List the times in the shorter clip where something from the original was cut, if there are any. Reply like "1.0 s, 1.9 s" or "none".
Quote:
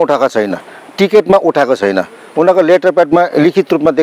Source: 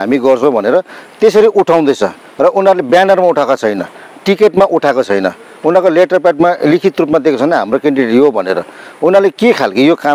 none